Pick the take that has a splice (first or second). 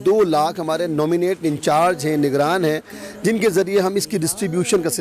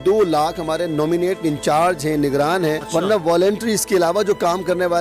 second